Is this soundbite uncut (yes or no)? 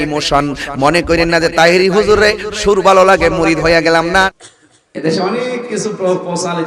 no